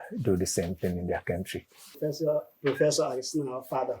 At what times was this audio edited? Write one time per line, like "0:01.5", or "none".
0:02.0